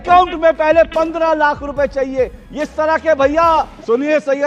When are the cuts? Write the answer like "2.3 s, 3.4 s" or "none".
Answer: none